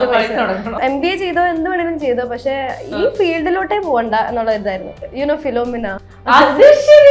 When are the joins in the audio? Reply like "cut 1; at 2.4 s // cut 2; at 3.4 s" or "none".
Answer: cut 1; at 0.8 s // cut 2; at 5.0 s // cut 3; at 6.1 s